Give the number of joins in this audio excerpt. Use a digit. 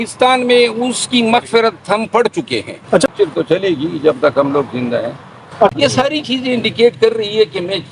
2